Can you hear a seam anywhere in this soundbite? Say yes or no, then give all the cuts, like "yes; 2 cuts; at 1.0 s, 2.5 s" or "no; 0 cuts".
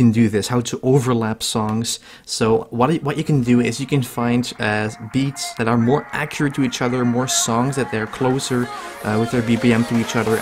no; 0 cuts